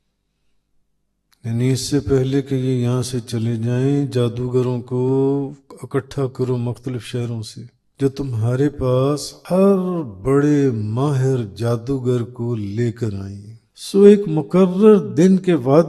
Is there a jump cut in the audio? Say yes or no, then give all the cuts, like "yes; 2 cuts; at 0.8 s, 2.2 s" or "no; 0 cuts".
yes; 3 cuts; at 7.8 s, 9.3 s, 13.6 s